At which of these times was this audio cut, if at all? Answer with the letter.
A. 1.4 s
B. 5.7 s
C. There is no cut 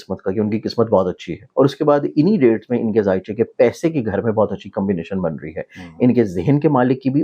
A